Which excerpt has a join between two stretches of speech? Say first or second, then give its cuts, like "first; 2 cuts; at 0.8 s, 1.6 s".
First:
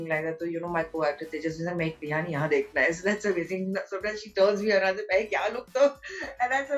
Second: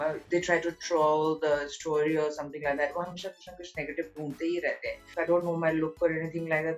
second; 1 cut; at 5.1 s